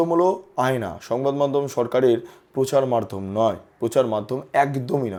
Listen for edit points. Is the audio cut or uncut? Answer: uncut